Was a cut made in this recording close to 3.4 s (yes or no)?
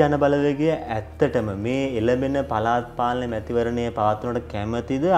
no